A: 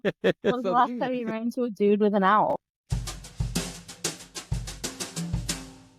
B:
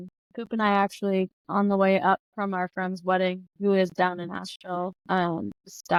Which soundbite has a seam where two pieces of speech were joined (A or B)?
A